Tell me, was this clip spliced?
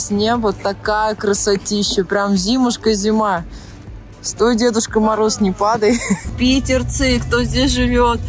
yes; 1 cut; at 6.3 s

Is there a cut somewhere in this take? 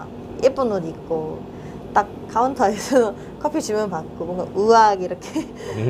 no; 0 cuts

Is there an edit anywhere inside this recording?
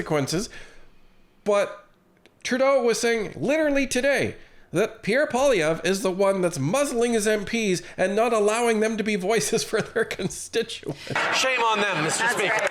yes; 1 cut; at 11.2 s

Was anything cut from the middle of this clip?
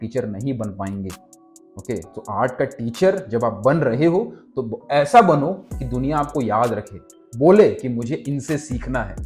no; 0 cuts

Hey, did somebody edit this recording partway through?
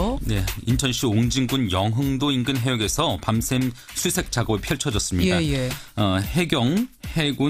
yes; 1 cut; at 2.2 s

